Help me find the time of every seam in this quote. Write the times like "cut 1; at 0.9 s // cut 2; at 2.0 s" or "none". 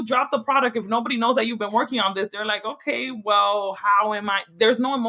none